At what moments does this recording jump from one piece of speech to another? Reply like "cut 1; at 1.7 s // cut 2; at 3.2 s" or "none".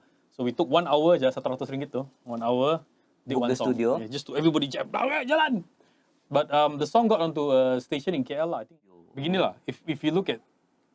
cut 1; at 8.7 s